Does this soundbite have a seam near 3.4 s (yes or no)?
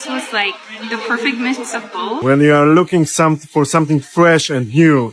no